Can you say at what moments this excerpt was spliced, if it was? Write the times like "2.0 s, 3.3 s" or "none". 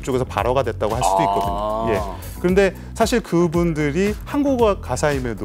none